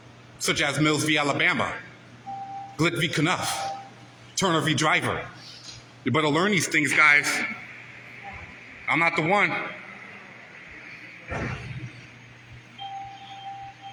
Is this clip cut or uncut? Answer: uncut